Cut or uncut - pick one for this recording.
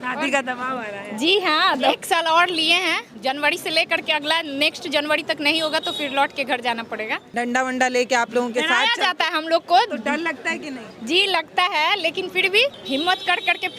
cut